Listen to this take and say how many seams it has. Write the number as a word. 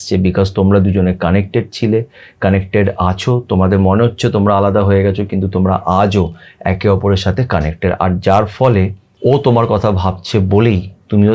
one